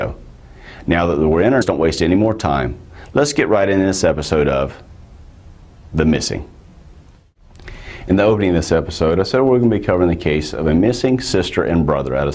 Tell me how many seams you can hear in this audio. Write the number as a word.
zero